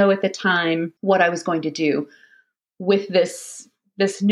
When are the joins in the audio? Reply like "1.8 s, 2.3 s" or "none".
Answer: 0.9 s

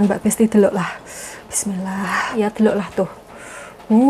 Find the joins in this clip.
2.4 s

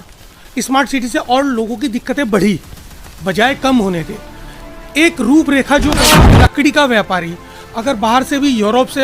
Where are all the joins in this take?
6.2 s

